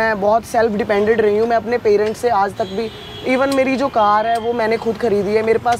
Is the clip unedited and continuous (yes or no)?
yes